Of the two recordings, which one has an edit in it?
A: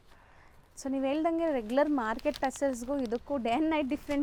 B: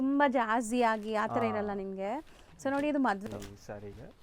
B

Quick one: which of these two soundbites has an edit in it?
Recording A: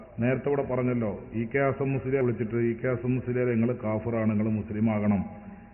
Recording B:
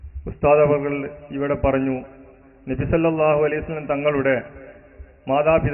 A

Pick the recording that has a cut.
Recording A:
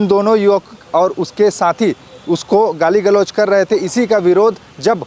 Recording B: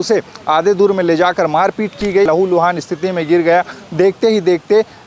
B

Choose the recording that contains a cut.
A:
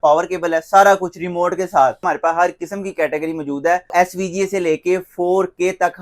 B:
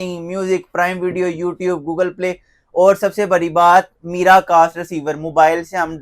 A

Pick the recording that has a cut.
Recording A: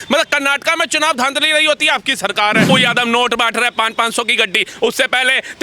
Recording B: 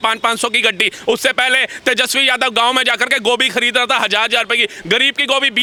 A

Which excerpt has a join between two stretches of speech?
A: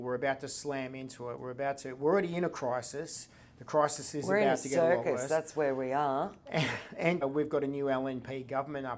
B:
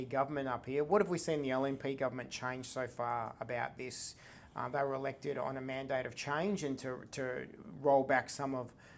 A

